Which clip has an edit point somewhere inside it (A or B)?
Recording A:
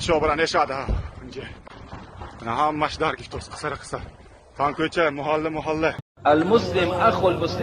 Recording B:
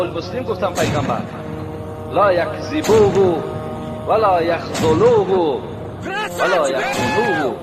A